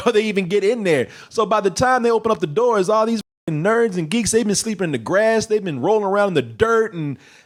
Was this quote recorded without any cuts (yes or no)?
yes